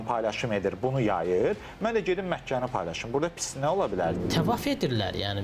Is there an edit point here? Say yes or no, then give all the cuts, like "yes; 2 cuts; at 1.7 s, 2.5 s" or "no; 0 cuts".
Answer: yes; 1 cut; at 4.2 s